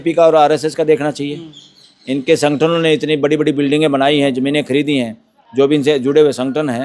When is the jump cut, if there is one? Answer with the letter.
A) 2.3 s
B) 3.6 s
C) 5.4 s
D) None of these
D